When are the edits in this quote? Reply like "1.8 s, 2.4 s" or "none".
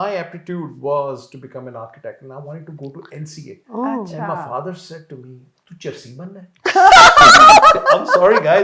none